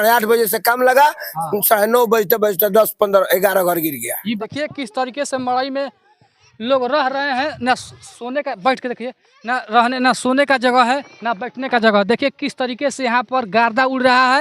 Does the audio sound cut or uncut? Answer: cut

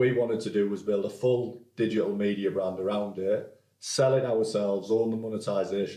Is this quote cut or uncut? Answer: uncut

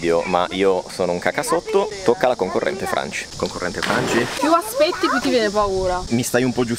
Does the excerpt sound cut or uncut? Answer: uncut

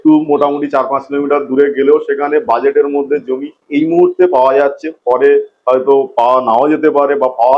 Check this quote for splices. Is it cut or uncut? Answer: uncut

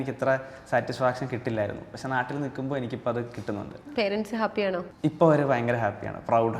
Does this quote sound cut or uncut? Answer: uncut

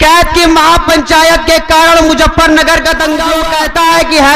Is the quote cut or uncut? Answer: cut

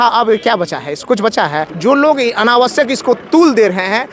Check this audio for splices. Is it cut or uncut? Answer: cut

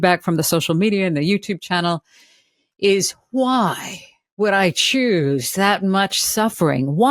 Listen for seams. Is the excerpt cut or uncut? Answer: uncut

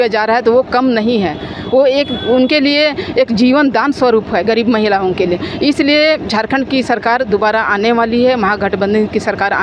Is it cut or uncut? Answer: uncut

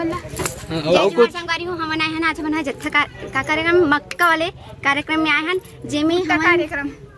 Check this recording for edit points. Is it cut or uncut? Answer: uncut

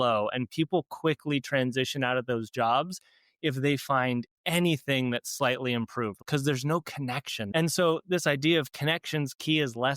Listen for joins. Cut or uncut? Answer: cut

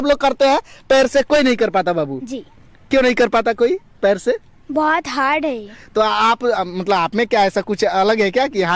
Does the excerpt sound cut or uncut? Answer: uncut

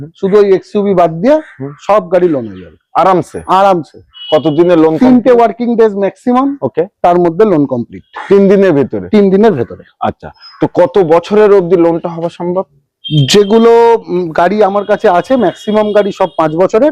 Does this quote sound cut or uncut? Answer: uncut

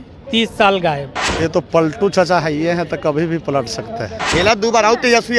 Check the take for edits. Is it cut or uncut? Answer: cut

